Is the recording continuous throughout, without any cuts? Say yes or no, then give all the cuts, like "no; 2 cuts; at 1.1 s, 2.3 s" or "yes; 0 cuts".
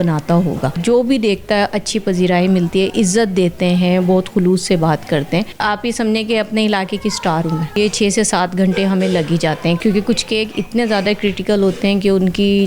no; 4 cuts; at 0.8 s, 5.5 s, 7.7 s, 9.8 s